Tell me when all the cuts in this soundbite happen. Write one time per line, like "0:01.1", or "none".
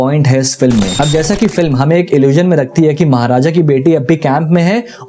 0:00.9